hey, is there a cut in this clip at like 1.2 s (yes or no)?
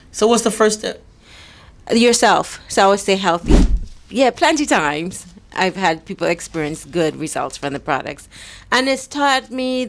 no